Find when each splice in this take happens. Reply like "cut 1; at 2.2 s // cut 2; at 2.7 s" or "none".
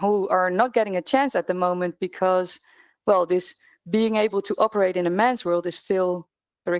none